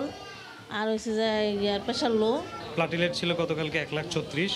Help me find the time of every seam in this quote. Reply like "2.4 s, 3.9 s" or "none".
2.6 s